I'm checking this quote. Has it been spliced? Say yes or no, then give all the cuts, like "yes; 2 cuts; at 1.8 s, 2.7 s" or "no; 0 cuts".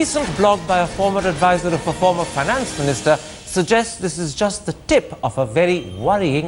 yes; 1 cut; at 5.4 s